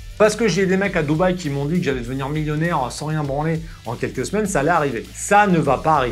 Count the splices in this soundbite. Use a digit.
1